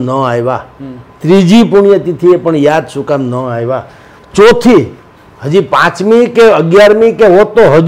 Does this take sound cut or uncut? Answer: uncut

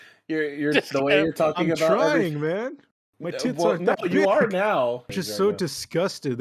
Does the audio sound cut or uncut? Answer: cut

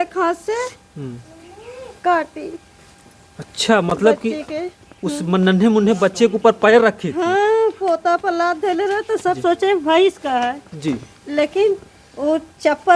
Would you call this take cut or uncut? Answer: uncut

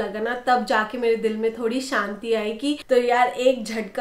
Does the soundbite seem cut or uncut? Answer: cut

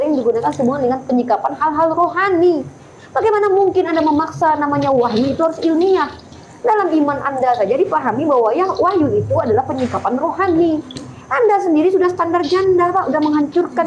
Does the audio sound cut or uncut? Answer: uncut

